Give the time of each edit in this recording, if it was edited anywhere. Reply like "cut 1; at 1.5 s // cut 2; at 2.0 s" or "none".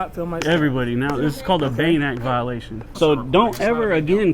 cut 1; at 2.8 s